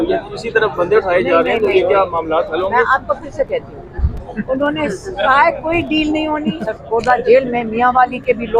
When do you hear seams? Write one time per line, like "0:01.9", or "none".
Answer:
0:06.7